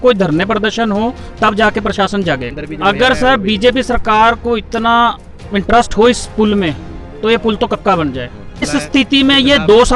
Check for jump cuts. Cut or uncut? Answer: cut